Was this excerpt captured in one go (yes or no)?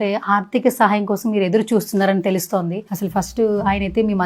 yes